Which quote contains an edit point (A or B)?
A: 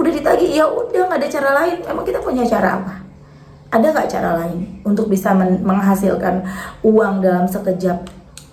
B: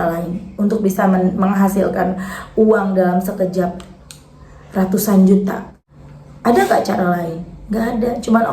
B